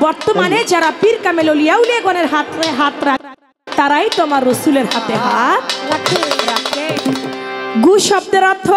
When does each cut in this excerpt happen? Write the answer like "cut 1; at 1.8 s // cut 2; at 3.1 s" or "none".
cut 1; at 7.0 s